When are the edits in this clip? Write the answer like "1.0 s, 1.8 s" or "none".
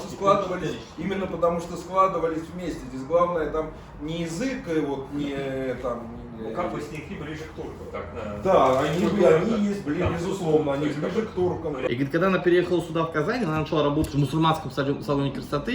11.9 s